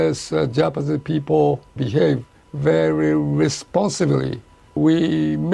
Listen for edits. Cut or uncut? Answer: uncut